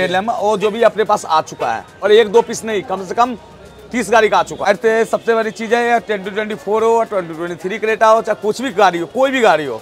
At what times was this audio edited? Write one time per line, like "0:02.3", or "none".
0:01.9
0:04.7